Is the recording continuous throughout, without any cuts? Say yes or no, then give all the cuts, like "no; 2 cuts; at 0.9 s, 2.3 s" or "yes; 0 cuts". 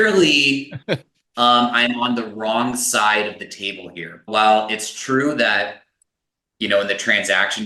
yes; 0 cuts